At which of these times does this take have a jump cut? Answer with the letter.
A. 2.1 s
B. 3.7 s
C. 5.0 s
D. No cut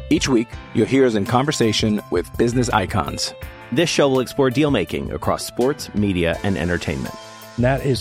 D